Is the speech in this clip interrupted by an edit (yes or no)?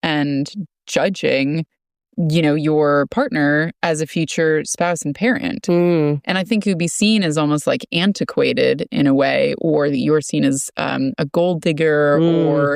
no